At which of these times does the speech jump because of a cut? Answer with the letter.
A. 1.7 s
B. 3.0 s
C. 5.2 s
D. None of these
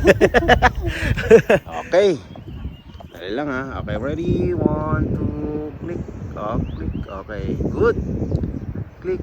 A